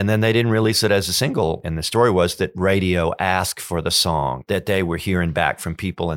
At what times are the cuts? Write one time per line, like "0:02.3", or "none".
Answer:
0:01.6
0:04.4